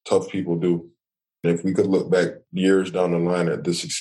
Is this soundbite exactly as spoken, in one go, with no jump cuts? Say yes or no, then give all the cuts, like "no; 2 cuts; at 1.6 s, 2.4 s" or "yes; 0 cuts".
no; 2 cuts; at 1.4 s, 2.4 s